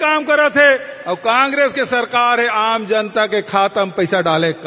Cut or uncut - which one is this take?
uncut